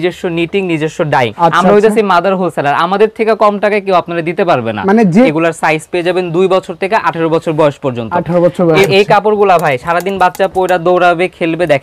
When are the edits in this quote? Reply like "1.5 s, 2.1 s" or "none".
1.3 s, 5.3 s, 8.9 s